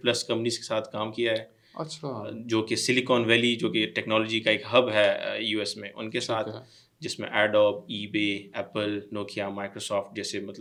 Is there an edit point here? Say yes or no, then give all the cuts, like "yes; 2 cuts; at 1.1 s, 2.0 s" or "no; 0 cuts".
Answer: no; 0 cuts